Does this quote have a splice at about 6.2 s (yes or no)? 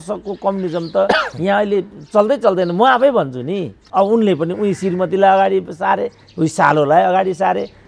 no